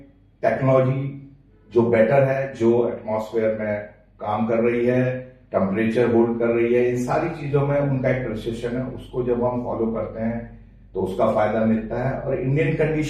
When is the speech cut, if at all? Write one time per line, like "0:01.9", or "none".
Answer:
none